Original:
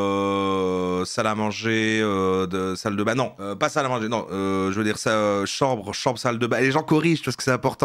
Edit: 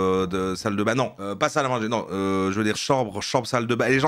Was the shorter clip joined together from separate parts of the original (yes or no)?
yes